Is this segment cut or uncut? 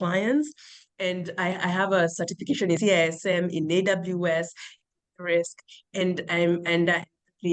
uncut